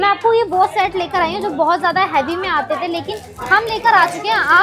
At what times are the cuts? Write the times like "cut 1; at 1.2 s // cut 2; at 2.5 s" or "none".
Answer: none